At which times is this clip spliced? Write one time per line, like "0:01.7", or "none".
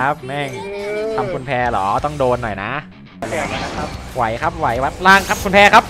0:03.2